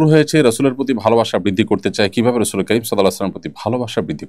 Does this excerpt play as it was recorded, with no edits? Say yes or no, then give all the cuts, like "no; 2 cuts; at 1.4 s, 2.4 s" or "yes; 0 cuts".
yes; 0 cuts